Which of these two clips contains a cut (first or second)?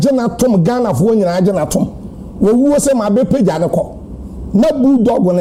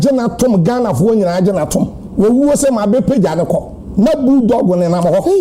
second